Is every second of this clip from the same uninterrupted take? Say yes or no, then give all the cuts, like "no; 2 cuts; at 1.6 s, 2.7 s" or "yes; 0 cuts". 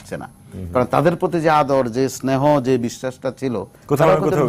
yes; 0 cuts